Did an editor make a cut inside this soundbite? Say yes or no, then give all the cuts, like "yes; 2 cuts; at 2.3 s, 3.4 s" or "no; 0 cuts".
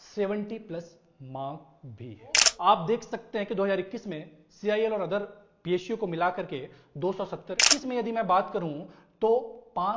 yes; 2 cuts; at 2.5 s, 7.7 s